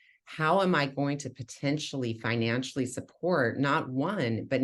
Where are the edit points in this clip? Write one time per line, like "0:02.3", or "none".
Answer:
none